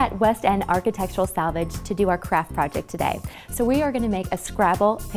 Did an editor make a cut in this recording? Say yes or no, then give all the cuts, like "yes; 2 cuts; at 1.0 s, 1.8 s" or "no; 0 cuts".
yes; 1 cut; at 3.4 s